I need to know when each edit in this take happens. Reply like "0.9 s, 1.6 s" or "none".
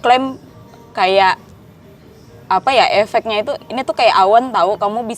none